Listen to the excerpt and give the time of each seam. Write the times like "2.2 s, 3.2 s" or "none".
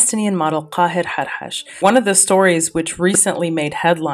1.6 s